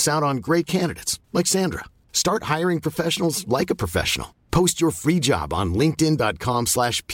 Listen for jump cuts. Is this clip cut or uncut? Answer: uncut